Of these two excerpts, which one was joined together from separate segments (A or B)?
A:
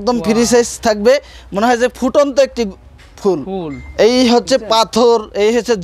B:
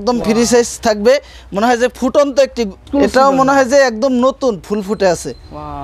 B